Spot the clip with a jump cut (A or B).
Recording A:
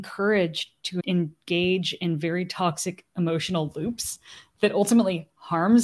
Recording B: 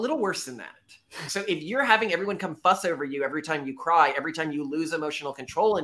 B